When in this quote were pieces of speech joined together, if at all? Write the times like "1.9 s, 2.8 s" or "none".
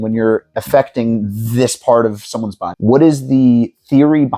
2.6 s